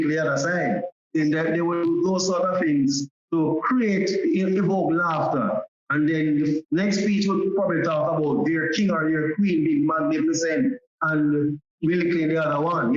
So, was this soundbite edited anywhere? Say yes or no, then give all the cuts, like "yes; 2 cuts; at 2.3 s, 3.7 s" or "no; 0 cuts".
no; 0 cuts